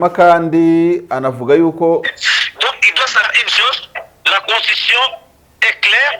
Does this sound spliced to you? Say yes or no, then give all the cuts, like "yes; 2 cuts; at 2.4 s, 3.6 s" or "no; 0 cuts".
yes; 1 cut; at 2.1 s